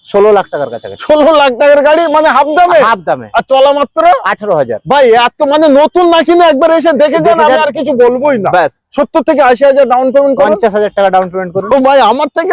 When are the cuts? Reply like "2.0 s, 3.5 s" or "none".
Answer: none